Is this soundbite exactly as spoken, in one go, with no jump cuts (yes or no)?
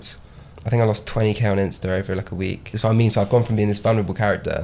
no